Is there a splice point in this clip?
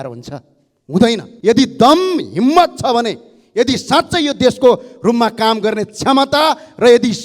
yes; 1 cut; at 1.3 s

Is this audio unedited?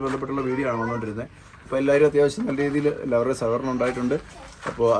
yes; 0 cuts

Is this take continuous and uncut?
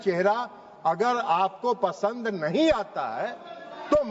yes; 0 cuts

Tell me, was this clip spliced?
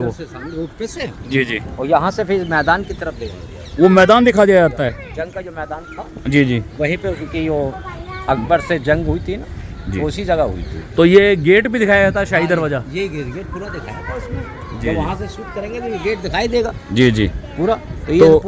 no; 0 cuts

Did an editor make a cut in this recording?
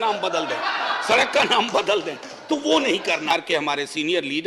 yes; 1 cut; at 3.3 s

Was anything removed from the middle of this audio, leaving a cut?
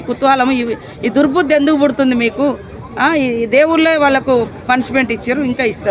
no; 0 cuts

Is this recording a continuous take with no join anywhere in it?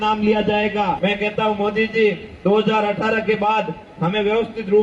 no; 1 cut; at 1.0 s

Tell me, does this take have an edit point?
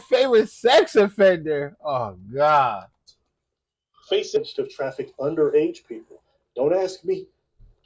yes; 1 cut; at 4.4 s

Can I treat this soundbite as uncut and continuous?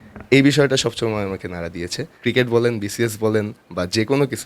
no; 1 cut; at 2.1 s

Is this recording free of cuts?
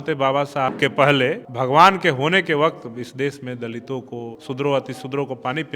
no; 3 cuts; at 0.7 s, 1.5 s, 4.3 s

